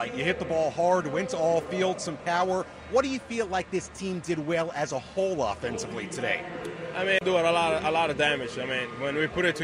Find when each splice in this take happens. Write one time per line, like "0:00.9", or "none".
0:07.2

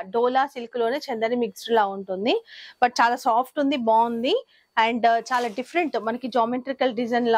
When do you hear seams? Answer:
none

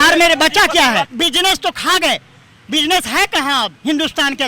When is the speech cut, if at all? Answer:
0:01.1

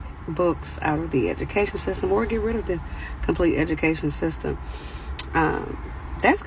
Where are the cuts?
0:02.5

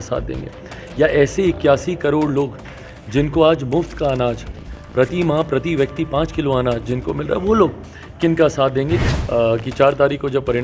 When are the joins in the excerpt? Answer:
0:09.1

